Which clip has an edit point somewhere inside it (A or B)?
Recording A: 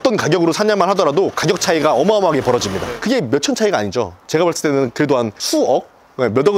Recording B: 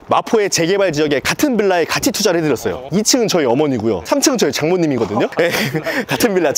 B